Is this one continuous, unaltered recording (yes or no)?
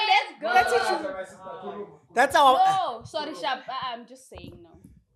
yes